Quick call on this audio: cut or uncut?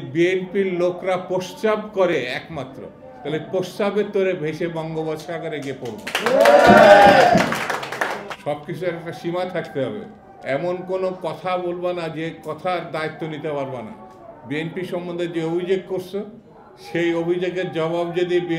uncut